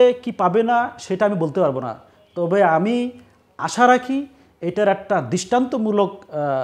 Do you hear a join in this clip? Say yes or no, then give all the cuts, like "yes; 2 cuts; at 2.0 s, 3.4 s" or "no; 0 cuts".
no; 0 cuts